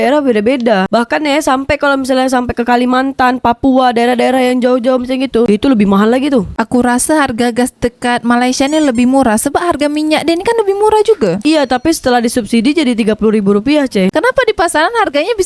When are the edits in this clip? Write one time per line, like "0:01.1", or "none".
0:05.5
0:06.5
0:11.4